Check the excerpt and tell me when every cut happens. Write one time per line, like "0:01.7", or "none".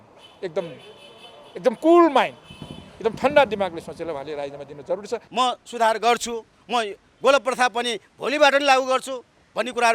0:05.3